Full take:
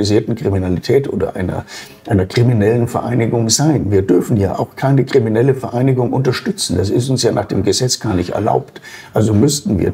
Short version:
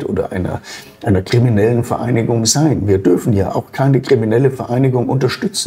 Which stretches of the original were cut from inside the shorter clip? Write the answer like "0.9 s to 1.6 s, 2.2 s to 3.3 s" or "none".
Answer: none